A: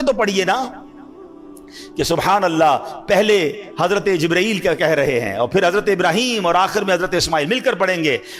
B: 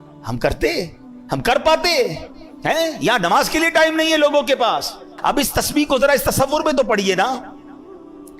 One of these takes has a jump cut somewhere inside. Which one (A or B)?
B